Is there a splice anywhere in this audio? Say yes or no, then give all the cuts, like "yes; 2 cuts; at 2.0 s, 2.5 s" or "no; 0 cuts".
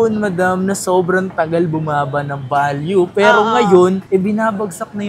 no; 0 cuts